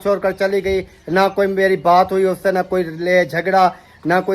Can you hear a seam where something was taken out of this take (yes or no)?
no